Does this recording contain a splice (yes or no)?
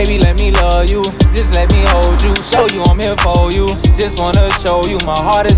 no